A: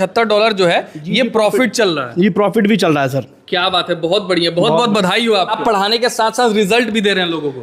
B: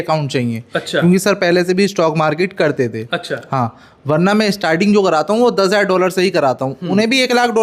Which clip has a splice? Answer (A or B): A